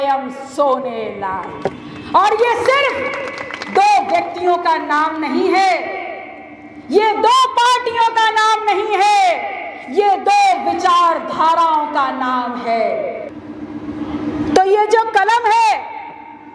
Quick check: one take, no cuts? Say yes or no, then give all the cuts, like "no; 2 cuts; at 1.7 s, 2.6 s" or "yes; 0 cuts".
no; 1 cut; at 13.3 s